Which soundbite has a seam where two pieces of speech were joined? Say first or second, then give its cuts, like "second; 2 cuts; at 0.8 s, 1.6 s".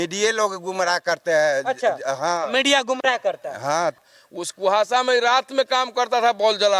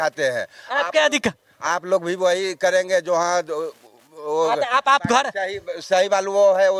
first; 1 cut; at 4.0 s